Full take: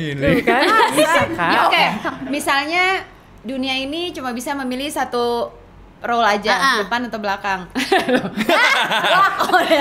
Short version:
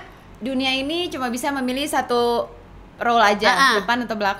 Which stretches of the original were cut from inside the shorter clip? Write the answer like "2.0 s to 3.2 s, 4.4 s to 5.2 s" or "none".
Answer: none